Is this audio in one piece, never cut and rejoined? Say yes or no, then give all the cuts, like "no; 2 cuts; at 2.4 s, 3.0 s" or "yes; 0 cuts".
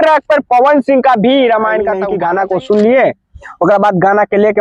no; 1 cut; at 2.0 s